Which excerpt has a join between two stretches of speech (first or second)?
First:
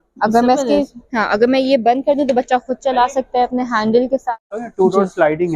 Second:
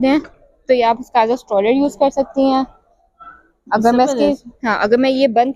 first